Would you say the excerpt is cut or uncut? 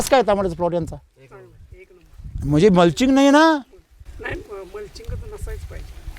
uncut